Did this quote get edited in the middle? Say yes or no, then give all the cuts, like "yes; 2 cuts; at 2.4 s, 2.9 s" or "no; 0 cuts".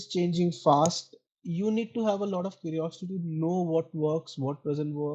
no; 0 cuts